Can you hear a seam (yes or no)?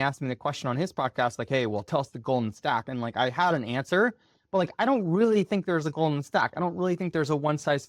no